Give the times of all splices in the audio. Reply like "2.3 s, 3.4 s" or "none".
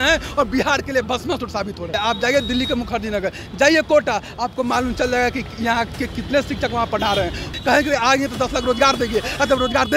1.9 s, 7.4 s